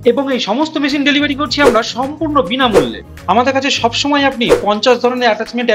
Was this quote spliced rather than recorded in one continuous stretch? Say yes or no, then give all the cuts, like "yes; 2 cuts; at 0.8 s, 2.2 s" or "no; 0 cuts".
yes; 1 cut; at 3.0 s